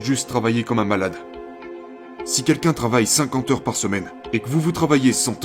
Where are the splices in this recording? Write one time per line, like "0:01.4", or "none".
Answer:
0:01.8
0:04.2